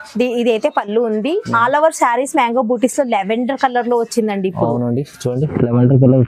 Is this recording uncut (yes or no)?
yes